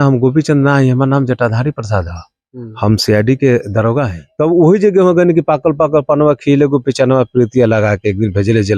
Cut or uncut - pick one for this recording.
cut